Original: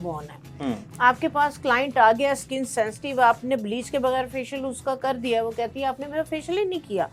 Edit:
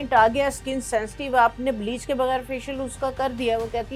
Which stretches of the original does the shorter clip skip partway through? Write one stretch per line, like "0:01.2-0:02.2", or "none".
none